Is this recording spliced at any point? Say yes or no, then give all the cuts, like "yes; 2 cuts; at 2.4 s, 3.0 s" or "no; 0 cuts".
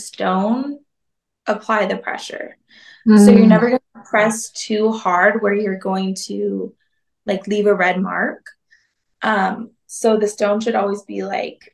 no; 0 cuts